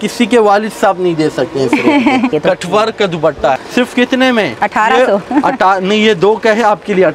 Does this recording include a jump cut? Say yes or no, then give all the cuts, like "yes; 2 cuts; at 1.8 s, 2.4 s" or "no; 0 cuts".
yes; 2 cuts; at 2.3 s, 3.6 s